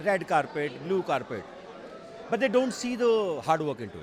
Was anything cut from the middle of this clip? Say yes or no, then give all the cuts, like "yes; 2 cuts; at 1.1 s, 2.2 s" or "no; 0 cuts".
no; 0 cuts